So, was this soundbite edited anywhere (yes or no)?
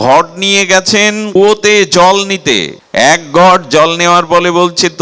yes